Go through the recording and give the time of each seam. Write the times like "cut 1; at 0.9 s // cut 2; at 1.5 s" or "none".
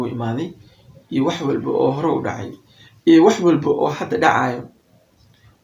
none